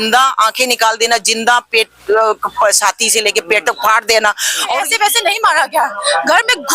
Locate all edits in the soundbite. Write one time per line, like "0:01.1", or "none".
0:04.8